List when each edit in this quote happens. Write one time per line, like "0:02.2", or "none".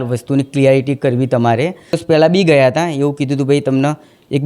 0:02.0